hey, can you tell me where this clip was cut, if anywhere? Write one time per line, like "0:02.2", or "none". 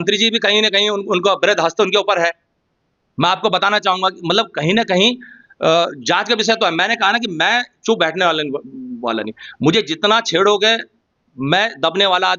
none